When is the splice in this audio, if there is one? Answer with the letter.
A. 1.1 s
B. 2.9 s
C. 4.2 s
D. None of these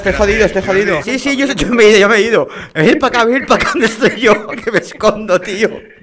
A